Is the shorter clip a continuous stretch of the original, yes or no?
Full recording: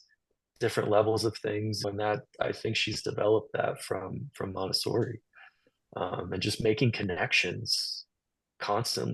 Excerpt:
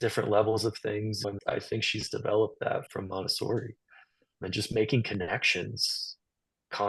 no